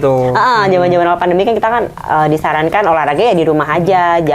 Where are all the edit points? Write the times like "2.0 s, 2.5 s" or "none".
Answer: none